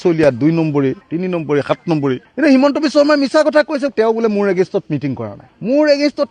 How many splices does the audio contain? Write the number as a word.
one